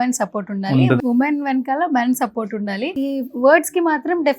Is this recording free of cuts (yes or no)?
no